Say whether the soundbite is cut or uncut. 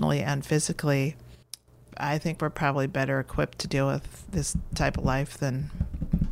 cut